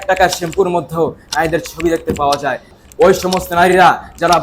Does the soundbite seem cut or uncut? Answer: cut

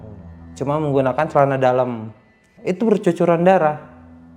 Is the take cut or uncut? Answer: cut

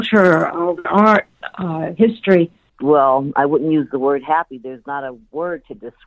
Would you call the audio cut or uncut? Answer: cut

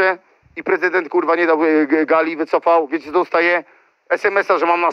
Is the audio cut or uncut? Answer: uncut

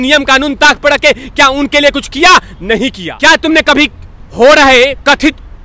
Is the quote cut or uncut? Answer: cut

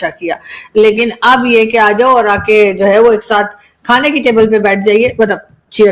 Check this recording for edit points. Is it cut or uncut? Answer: uncut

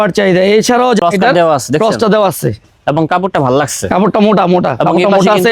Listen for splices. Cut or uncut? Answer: cut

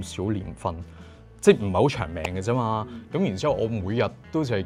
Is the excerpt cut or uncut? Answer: uncut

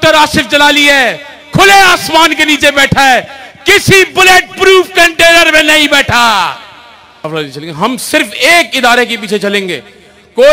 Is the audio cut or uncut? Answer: cut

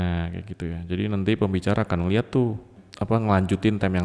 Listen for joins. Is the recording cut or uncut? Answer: cut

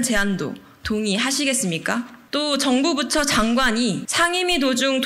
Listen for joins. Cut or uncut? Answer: cut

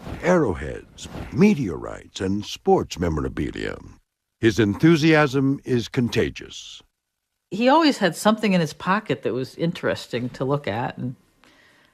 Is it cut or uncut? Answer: uncut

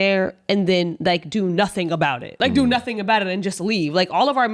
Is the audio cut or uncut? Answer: cut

